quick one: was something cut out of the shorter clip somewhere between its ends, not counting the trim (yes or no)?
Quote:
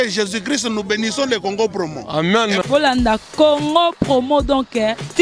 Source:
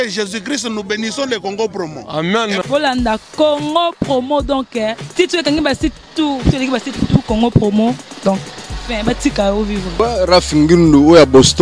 no